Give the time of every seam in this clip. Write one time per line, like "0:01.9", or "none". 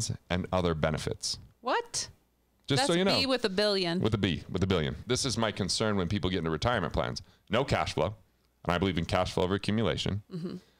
0:05.0